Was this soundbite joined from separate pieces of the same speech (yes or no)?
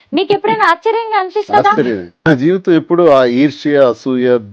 yes